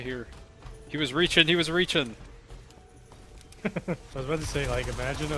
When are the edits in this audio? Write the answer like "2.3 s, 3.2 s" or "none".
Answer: 4.1 s